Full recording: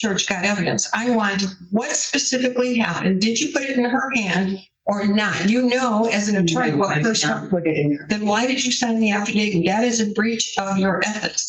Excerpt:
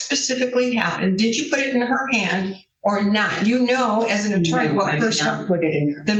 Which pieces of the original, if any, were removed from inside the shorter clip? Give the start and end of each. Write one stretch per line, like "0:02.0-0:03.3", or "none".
none

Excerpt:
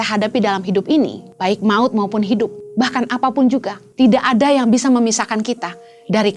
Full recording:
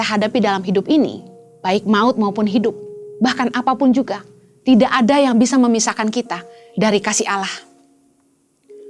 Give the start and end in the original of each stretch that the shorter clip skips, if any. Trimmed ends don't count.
0:01.2-0:01.5
0:02.9-0:03.1
0:04.2-0:04.5

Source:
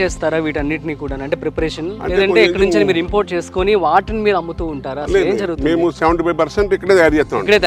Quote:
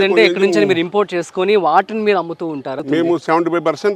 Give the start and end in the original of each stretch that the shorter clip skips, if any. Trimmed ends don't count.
0:05.0-0:05.5

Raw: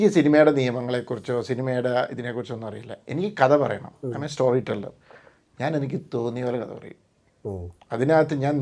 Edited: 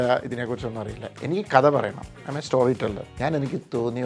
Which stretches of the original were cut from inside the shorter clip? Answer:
0:04.9-0:05.5

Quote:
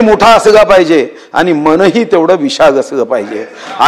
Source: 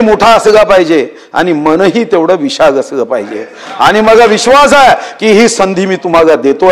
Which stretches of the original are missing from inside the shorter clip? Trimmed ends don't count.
none

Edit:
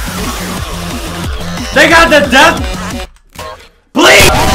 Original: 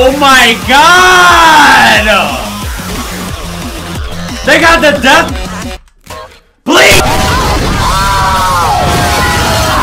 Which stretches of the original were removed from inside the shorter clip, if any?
none

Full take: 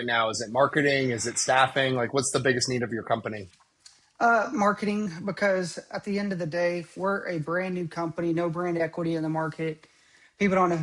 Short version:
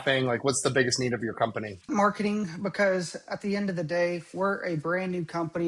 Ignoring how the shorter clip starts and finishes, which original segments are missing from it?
0:03.6-0:04.5

